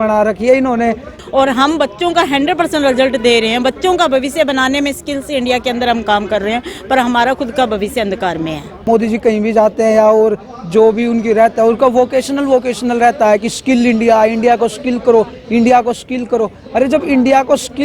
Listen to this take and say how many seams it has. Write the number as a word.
two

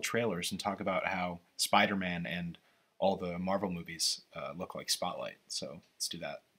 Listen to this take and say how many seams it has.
zero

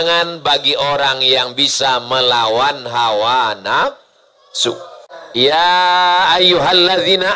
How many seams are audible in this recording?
one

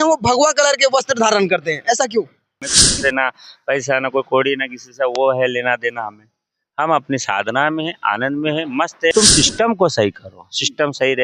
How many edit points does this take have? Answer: two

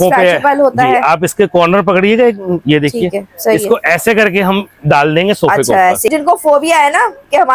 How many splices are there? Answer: one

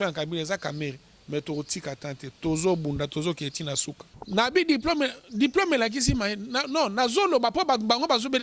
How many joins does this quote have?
one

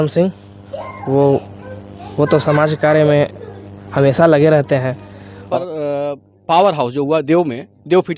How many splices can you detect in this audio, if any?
one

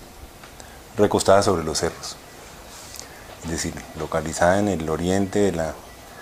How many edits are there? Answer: zero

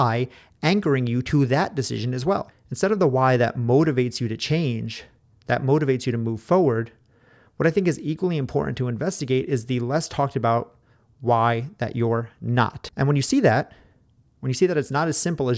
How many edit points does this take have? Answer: two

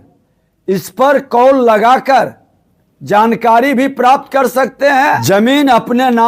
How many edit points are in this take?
one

